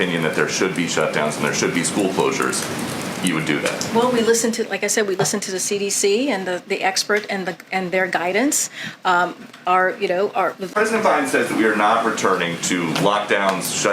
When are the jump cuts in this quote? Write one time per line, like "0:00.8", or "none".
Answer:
0:10.6